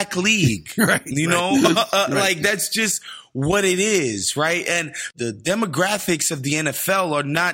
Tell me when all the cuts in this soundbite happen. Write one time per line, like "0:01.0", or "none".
0:05.1